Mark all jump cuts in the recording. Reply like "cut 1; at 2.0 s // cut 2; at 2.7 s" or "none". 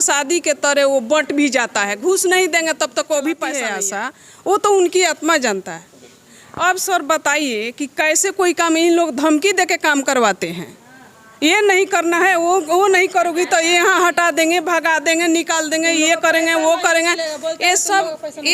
cut 1; at 3.7 s